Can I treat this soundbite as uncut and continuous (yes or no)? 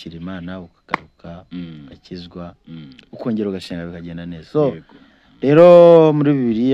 yes